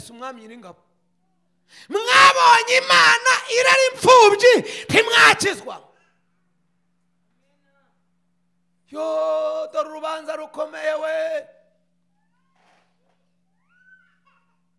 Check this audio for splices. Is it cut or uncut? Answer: uncut